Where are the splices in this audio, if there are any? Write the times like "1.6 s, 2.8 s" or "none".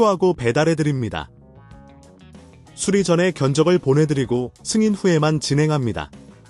none